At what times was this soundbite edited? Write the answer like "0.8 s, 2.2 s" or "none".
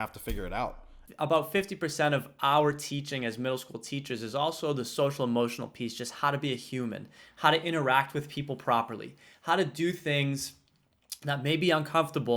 1.0 s